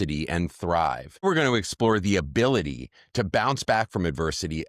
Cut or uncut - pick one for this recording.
cut